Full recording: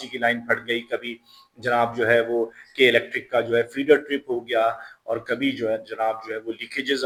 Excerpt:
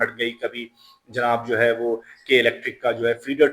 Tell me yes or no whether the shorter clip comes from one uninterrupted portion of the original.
yes